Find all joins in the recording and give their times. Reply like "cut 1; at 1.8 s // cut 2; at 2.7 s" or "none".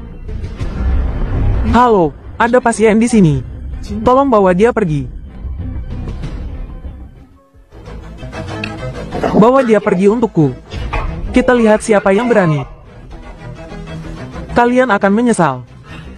none